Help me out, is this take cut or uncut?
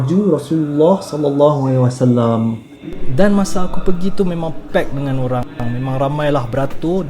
cut